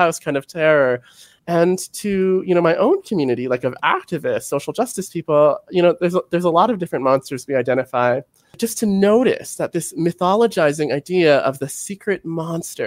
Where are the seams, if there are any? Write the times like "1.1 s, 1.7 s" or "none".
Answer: 8.5 s